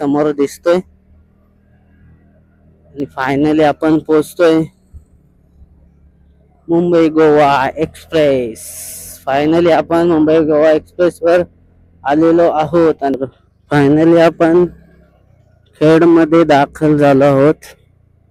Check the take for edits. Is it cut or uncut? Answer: cut